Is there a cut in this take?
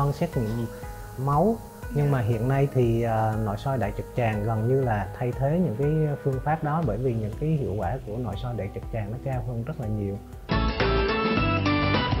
yes; 1 cut; at 10.3 s

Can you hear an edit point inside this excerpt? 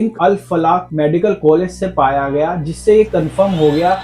no; 0 cuts

